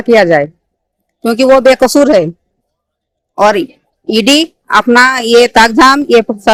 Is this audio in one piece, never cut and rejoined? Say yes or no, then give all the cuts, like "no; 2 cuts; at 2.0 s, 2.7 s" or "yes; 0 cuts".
yes; 0 cuts